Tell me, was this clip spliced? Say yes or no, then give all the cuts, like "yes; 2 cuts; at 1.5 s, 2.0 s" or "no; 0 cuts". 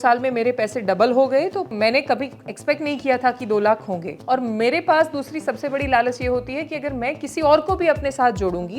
yes; 2 cuts; at 1.7 s, 4.1 s